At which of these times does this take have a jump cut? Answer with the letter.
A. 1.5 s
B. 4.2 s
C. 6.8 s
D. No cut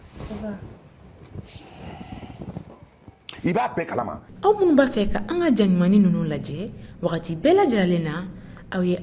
B